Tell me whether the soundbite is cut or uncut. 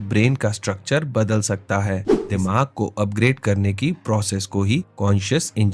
cut